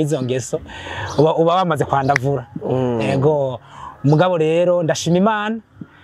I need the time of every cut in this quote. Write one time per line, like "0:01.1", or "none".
none